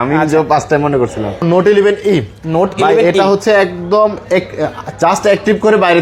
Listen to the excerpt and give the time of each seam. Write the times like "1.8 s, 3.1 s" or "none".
1.4 s